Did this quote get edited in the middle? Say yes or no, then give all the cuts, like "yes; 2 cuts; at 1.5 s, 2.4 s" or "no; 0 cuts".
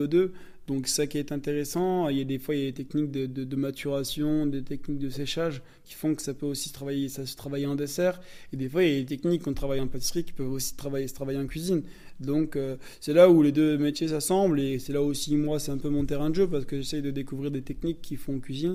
no; 0 cuts